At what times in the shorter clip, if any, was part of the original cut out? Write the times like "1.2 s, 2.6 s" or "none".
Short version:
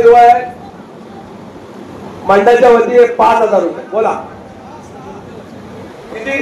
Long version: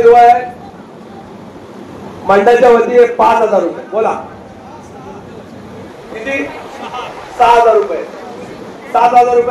none